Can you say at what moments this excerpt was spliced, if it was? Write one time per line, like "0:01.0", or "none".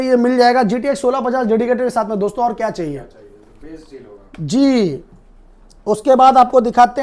none